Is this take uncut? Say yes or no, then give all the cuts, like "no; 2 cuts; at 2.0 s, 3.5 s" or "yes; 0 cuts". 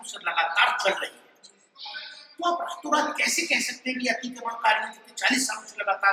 yes; 0 cuts